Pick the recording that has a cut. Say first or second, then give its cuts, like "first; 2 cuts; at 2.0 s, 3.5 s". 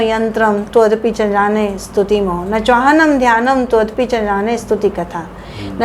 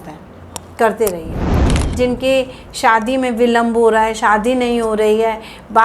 second; 1 cut; at 1.6 s